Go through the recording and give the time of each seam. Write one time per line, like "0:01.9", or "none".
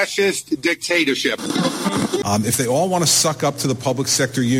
0:02.2